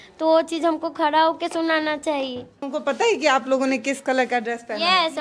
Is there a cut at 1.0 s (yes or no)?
no